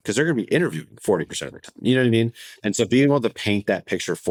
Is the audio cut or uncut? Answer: uncut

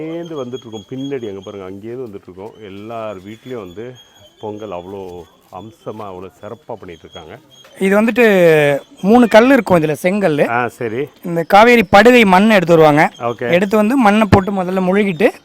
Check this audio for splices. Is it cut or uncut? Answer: cut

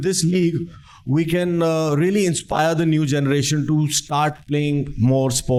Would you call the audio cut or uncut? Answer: uncut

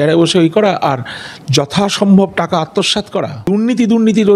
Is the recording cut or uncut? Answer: cut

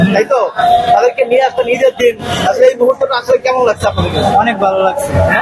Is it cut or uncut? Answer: uncut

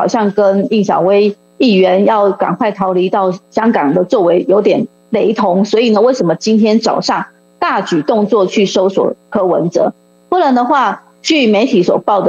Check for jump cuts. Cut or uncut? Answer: uncut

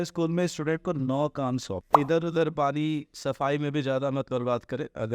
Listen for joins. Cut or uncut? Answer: cut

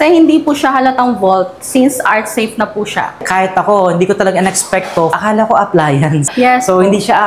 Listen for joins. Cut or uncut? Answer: cut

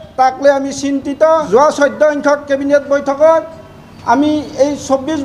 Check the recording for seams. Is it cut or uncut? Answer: cut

